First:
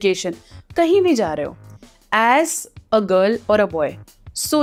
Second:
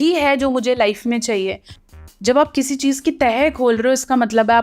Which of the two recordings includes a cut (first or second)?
second